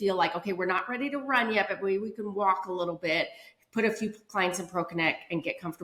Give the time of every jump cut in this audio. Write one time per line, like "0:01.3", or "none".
none

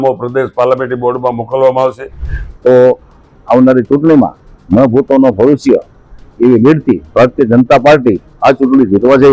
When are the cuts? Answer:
0:02.4

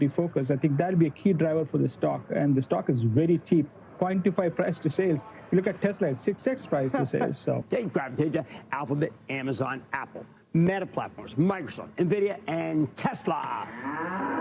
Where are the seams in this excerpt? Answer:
0:07.6

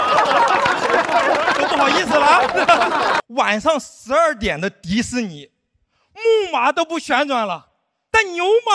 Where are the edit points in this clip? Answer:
0:03.2

